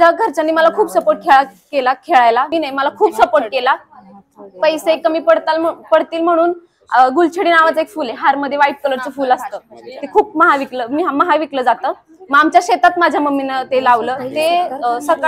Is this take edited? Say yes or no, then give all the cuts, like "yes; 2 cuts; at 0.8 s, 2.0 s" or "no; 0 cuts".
yes; 1 cut; at 2.5 s